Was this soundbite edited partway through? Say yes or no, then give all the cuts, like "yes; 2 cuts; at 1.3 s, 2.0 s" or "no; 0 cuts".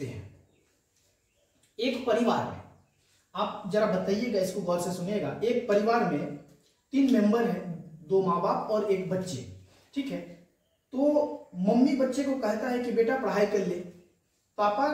no; 0 cuts